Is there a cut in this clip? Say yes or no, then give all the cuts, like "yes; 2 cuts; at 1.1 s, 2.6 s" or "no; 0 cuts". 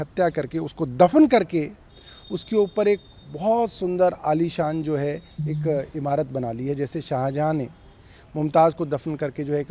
no; 0 cuts